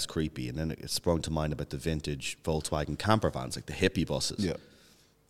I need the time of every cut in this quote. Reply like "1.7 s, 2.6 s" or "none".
none